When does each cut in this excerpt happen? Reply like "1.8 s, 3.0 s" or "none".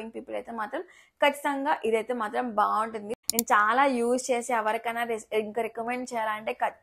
3.1 s